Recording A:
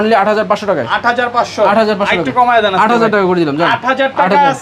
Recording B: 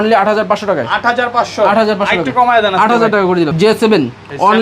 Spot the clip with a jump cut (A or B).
B